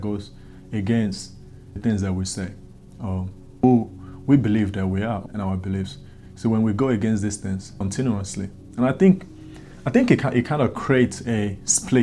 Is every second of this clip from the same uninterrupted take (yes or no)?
no